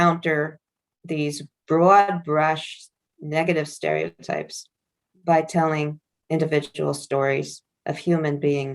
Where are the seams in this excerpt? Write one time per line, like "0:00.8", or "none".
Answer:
0:06.1